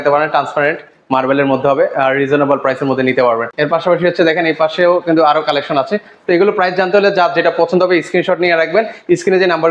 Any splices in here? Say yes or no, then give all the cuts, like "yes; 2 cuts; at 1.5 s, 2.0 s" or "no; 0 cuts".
yes; 1 cut; at 3.5 s